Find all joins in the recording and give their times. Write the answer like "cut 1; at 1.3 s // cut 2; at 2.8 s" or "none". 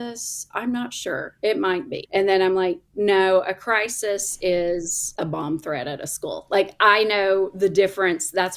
cut 1; at 2.0 s // cut 2; at 5.0 s